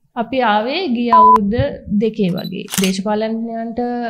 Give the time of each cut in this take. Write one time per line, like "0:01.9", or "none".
0:02.8